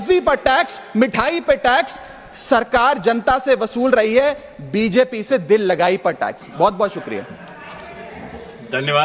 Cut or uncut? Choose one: uncut